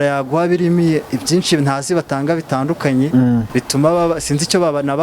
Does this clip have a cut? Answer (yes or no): yes